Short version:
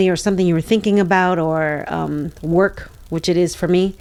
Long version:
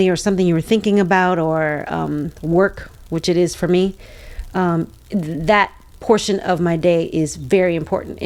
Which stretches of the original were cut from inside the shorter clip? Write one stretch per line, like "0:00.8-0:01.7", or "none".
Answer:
none